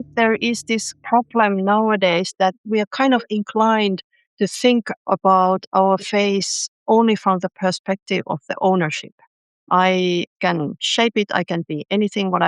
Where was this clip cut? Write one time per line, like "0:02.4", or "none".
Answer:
0:00.9
0:02.6
0:09.6